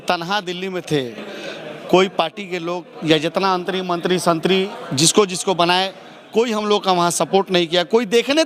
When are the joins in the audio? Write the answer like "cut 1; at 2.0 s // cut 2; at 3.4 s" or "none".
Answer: none